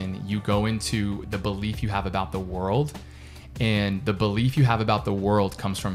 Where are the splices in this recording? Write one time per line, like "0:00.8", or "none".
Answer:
none